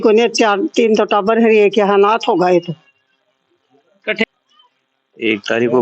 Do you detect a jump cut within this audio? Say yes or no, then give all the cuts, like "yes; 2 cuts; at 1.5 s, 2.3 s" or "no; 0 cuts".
yes; 1 cut; at 4.2 s